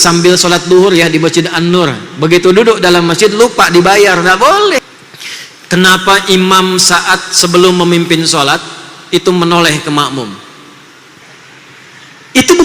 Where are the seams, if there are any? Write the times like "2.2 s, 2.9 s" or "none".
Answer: 4.8 s, 11.2 s